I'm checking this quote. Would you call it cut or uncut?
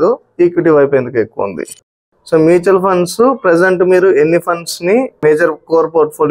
cut